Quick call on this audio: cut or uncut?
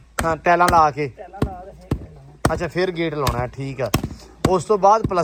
uncut